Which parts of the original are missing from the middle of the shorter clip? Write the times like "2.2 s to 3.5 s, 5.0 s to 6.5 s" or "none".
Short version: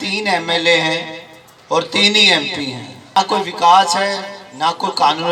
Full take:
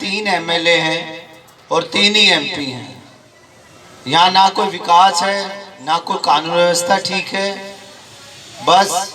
3.2 s to 4.4 s